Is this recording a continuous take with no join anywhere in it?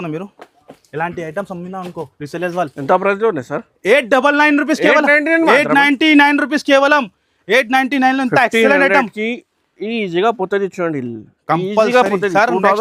yes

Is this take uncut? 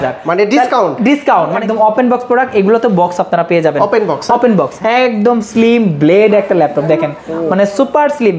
no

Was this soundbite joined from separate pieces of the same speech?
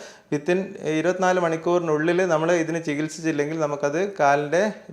no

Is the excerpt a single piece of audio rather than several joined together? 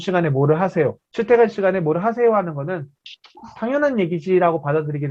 no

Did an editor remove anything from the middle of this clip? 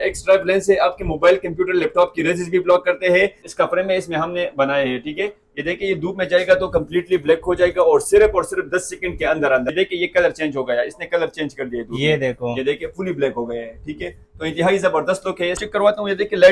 yes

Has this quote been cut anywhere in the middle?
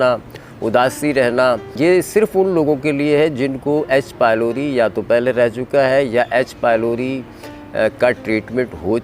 yes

